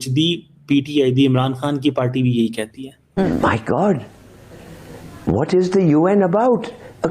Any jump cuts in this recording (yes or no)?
yes